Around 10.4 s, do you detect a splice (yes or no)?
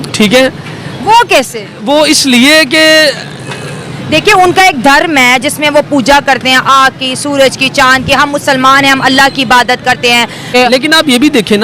yes